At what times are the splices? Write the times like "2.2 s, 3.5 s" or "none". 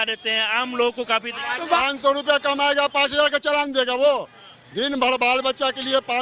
1.8 s